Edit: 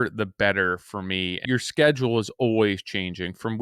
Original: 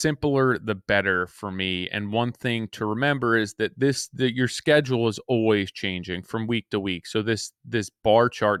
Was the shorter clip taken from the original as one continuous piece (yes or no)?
no